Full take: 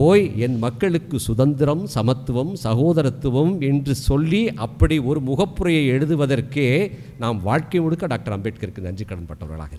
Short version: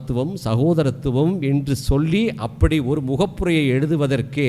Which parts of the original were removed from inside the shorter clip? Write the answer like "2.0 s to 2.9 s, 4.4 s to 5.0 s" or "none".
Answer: none